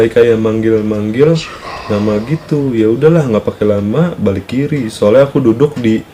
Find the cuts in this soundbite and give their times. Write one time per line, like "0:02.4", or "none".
none